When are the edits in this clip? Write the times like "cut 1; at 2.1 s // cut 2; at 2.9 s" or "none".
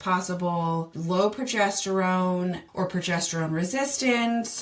cut 1; at 0.9 s // cut 2; at 2.6 s